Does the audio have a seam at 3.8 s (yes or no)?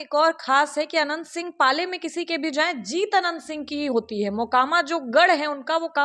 no